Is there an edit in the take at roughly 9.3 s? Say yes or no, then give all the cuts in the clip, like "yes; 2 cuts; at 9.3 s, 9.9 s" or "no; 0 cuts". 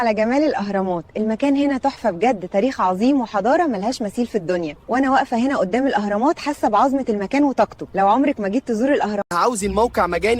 yes; 1 cut; at 9.3 s